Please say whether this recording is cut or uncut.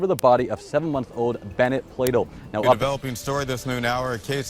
cut